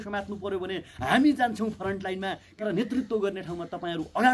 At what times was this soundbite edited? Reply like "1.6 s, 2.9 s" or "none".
2.6 s